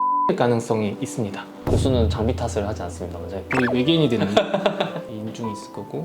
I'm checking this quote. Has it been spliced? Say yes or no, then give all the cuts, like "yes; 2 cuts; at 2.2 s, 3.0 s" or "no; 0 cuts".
yes; 3 cuts; at 1.5 s, 3.4 s, 5.0 s